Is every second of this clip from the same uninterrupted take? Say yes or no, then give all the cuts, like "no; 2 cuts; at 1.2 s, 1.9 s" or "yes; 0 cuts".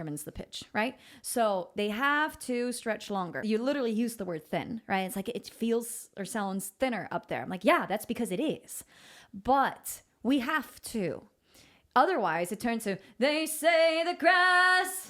no; 1 cut; at 3.4 s